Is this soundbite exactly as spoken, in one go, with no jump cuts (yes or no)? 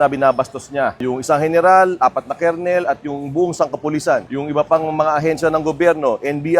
no